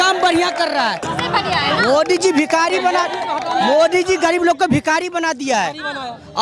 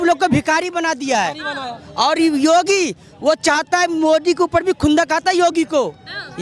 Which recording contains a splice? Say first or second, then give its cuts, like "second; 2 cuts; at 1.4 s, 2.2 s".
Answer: first; 1 cut; at 1.1 s